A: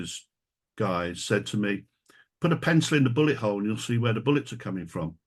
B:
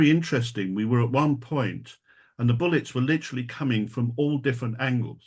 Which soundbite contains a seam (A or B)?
B